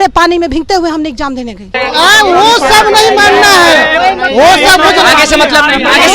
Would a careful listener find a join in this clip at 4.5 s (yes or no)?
no